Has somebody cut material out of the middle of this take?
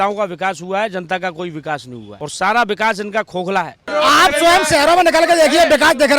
yes; 2 cuts; at 2.0 s, 3.9 s

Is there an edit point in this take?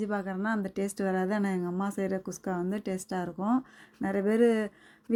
no; 0 cuts

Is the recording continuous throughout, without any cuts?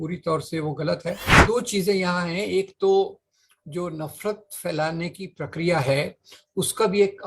no; 1 cut; at 1.3 s

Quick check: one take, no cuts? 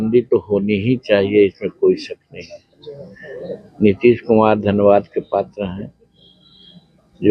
yes; 0 cuts

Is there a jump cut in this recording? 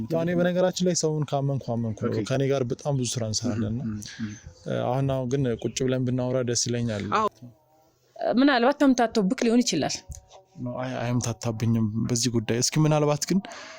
yes; 1 cut; at 7.3 s

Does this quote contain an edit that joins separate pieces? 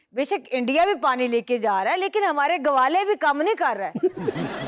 no; 0 cuts

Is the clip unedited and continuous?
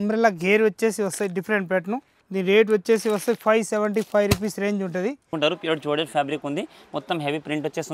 no; 2 cuts; at 2.2 s, 5.3 s

